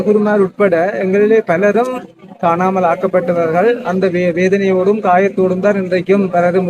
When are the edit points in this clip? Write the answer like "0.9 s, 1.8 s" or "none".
none